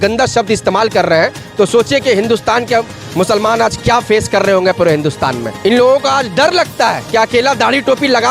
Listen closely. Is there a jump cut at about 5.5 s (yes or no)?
yes